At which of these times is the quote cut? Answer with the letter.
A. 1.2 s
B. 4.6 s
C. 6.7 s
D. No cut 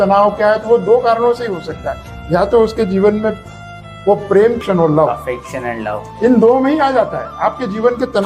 B